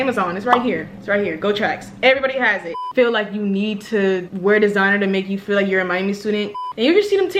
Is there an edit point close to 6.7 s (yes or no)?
yes